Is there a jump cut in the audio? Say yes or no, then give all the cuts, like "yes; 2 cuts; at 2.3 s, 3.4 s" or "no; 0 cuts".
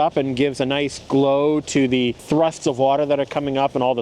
yes; 1 cut; at 2.2 s